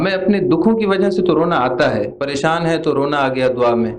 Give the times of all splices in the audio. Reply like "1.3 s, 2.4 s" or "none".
2.2 s